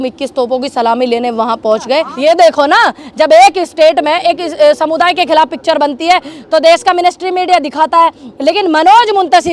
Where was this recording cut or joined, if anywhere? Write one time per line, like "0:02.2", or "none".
0:02.1